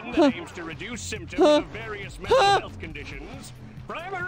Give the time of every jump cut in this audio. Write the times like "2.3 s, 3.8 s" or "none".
none